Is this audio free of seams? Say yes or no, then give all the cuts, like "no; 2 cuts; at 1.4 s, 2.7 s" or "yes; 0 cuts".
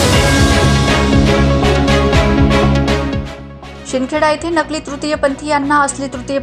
yes; 0 cuts